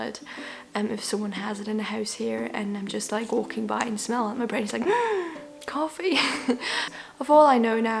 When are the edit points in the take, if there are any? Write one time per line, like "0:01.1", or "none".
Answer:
0:06.9